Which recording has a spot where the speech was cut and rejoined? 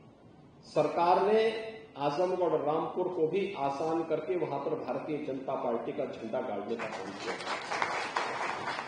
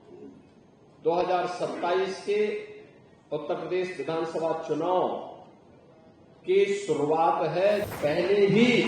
second; 1 cut; at 7.9 s

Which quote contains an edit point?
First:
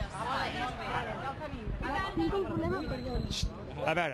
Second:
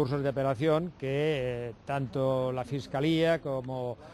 second; 1 cut; at 1.9 s

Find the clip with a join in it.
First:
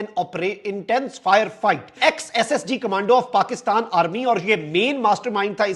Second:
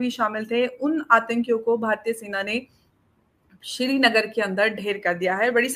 first; 1 cut; at 1.9 s

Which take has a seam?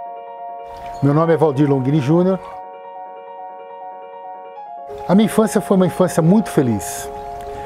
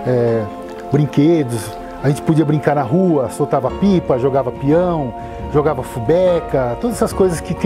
first; 1 cut; at 1.0 s

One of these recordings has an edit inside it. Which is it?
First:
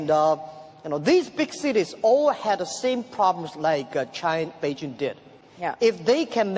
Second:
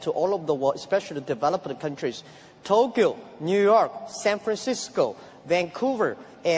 second; 1 cut; at 1.1 s

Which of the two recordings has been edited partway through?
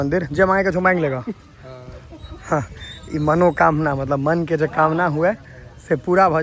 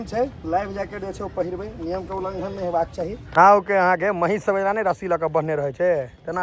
second; 1 cut; at 3.3 s

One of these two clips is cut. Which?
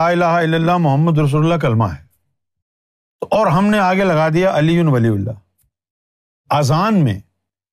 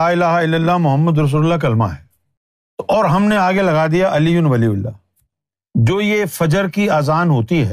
second; 2 cuts; at 2.9 s, 5.9 s

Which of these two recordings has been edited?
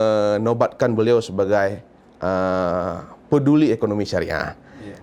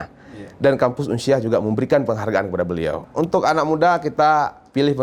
second; 1 cut; at 3.0 s

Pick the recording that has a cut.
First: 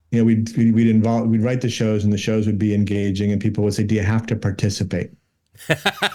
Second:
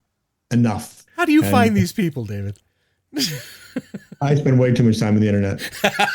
second; 1 cut; at 1.0 s

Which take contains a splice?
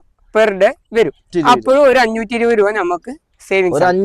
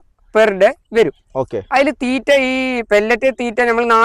first; 1 cut; at 1.3 s

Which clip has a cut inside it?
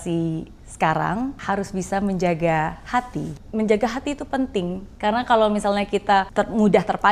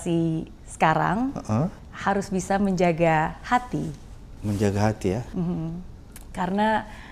first; 4 cuts; at 1.4 s, 3.4 s, 4.8 s, 6.3 s

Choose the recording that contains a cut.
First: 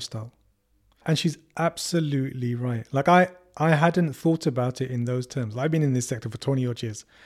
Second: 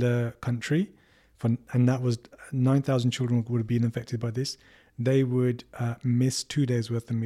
first; 1 cut; at 1.0 s

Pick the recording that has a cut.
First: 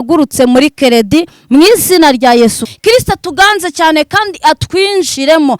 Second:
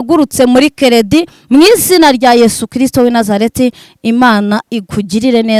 first; 1 cut; at 2.7 s

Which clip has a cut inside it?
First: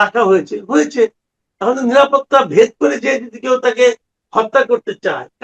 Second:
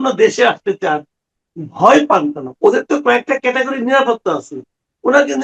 second; 1 cut; at 2.4 s

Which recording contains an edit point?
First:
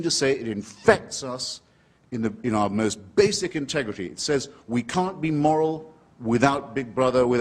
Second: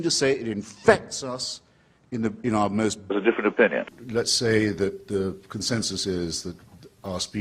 first; 1 cut; at 3.1 s

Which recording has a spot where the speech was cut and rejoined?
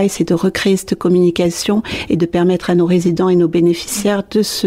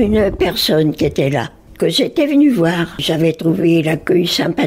second; 1 cut; at 3.0 s

